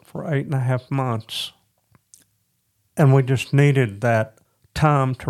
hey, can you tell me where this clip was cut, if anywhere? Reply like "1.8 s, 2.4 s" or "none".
none